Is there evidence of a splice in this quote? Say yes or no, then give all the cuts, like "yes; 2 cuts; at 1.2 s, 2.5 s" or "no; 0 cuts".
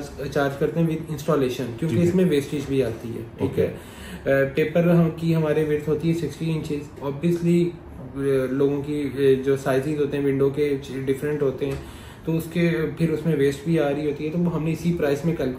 no; 0 cuts